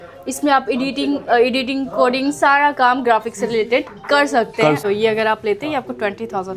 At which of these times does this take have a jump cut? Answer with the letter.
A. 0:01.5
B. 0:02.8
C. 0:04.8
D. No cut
C